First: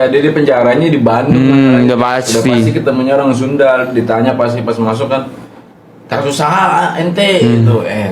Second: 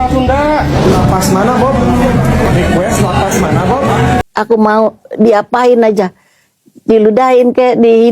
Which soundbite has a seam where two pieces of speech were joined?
second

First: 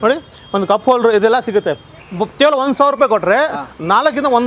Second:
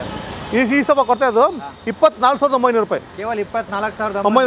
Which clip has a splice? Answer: first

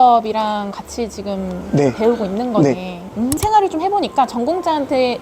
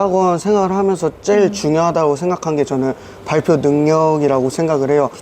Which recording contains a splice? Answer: first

